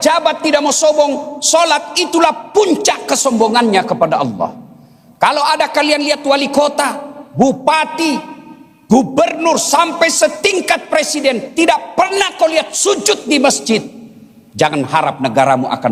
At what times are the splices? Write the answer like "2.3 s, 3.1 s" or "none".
none